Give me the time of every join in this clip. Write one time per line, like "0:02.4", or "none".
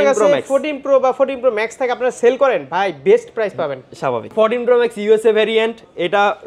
none